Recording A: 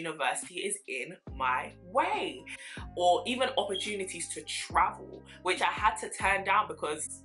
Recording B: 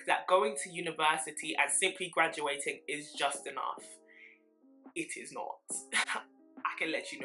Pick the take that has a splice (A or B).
A